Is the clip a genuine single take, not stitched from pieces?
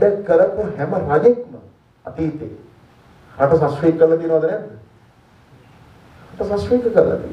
yes; 0 cuts

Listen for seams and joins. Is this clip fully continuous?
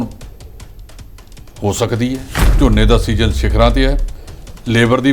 no; 1 cut; at 2.4 s

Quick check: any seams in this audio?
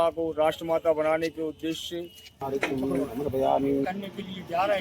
yes; 2 cuts; at 2.4 s, 3.8 s

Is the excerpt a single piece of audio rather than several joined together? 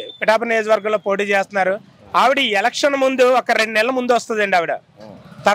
yes; 0 cuts

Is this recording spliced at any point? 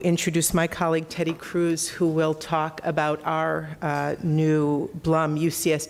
no; 0 cuts

